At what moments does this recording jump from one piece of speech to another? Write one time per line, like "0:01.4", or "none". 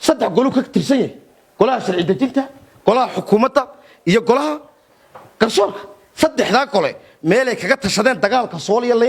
none